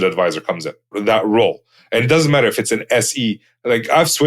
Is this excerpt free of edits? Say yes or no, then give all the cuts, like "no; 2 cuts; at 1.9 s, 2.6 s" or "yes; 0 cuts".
no; 1 cut; at 1.0 s